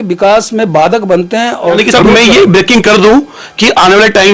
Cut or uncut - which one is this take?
cut